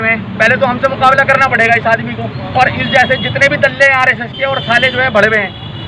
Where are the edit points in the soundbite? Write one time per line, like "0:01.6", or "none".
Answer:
none